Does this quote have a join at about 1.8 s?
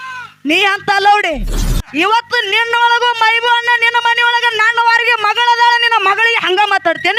yes; 1 cut; at 1.8 s

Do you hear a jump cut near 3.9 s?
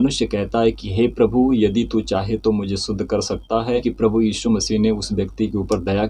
yes; 1 cut; at 3.9 s

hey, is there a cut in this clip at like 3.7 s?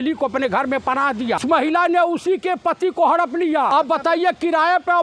yes; 2 cuts; at 1.4 s, 3.7 s

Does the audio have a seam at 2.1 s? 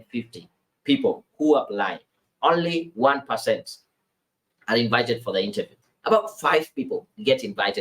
no; 1 cut; at 5.7 s

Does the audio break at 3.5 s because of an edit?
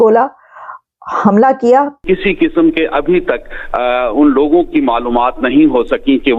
no; 1 cut; at 2.0 s

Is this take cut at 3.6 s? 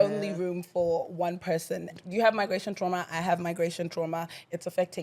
no; 1 cut; at 2.0 s

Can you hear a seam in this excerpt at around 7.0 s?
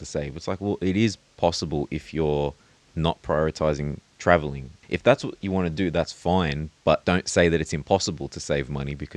yes; 2 cuts; at 4.8 s, 7.0 s

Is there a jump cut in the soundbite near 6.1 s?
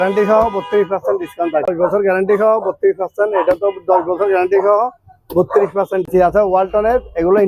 yes; 2 cuts; at 1.7 s, 6.1 s

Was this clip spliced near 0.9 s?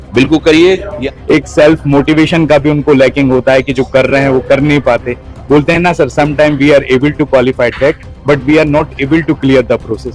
yes; 1 cut; at 0.9 s

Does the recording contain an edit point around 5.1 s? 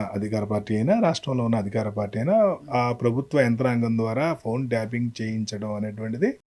no; 0 cuts

